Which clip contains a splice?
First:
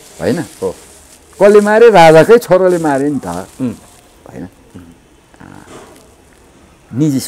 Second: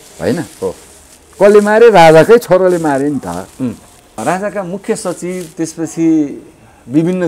second; 1 cut; at 4.2 s

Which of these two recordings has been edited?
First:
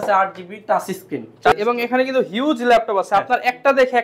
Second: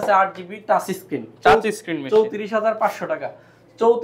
first; 1 cut; at 1.5 s

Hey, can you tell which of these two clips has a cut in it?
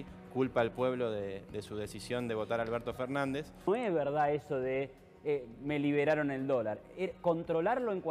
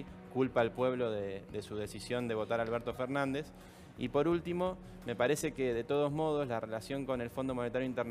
first; 1 cut; at 3.7 s

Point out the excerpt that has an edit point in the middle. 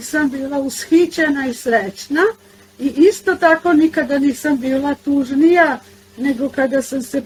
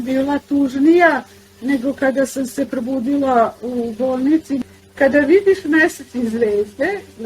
second; 1 cut; at 4.6 s

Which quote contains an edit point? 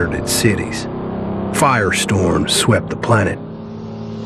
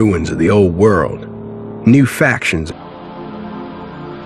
second; 1 cut; at 2.7 s

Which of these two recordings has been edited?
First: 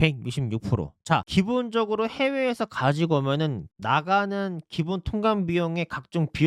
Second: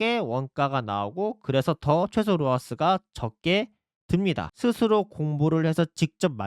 second; 1 cut; at 4.5 s

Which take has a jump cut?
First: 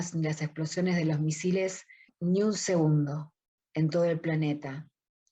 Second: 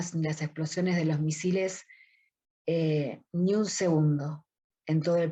first; 1 cut; at 2.1 s

